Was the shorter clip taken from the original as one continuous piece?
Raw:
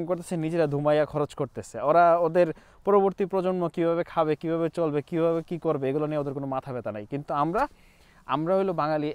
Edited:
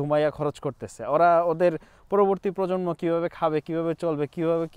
yes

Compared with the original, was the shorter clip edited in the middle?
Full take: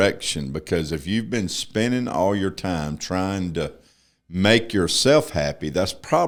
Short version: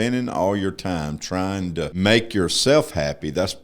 yes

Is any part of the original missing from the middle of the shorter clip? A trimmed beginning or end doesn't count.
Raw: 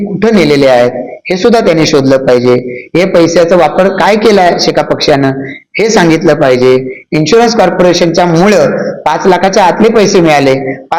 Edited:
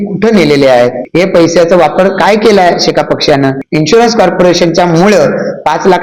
yes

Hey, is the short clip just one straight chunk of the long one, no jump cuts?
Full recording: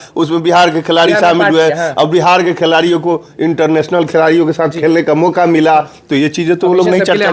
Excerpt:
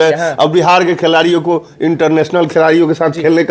yes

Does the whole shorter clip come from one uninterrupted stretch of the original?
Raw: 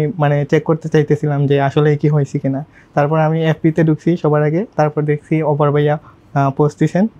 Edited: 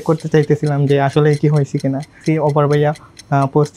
no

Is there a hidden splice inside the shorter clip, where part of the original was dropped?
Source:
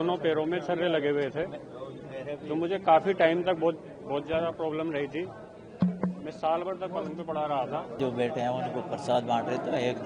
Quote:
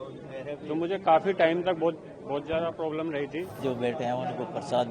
yes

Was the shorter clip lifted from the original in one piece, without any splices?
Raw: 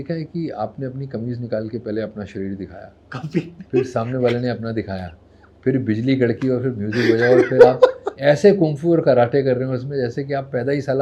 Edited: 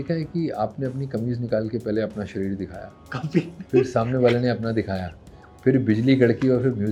yes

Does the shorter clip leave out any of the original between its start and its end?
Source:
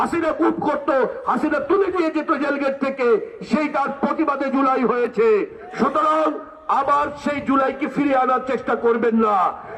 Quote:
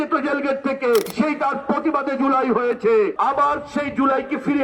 yes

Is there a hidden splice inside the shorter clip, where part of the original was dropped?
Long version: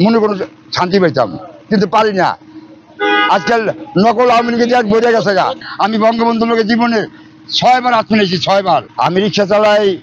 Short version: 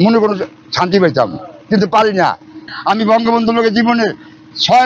yes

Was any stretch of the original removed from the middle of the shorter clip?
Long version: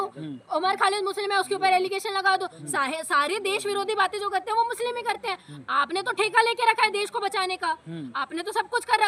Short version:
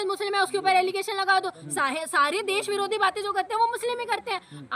no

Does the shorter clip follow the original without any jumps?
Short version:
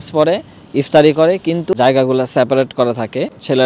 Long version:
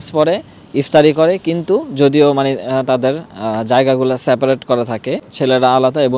no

